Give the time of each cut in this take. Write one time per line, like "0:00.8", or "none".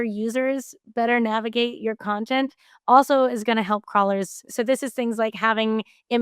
0:04.5